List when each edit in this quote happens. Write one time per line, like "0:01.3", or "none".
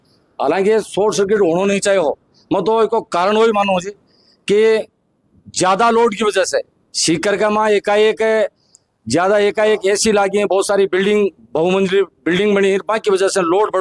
none